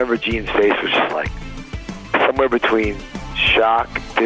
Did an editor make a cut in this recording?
no; 0 cuts

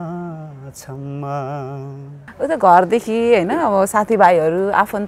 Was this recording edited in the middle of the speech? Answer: yes; 1 cut; at 2.2 s

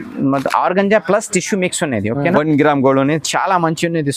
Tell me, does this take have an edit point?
yes; 1 cut; at 2.3 s

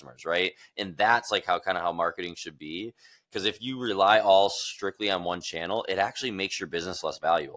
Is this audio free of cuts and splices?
yes; 0 cuts

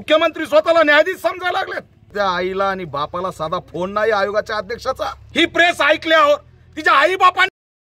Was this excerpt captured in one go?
no; 2 cuts; at 2.0 s, 5.2 s

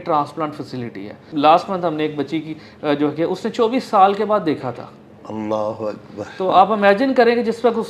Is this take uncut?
no; 1 cut; at 1.2 s

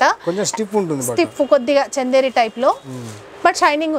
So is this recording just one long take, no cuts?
yes; 0 cuts

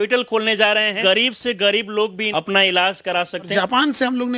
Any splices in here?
yes; 3 cuts; at 1.0 s, 2.2 s, 3.5 s

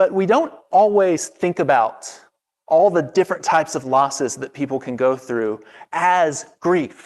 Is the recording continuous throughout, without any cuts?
yes; 0 cuts

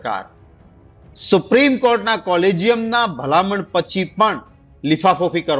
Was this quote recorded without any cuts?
yes; 0 cuts

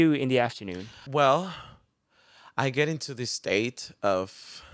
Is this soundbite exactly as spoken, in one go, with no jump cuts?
no; 1 cut; at 0.9 s

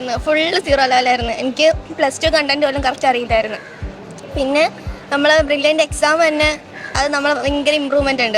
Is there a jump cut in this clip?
no; 0 cuts

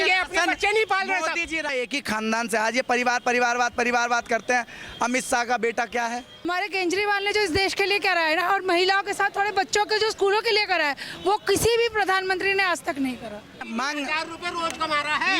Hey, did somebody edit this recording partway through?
yes; 3 cuts; at 1.7 s, 6.5 s, 13.7 s

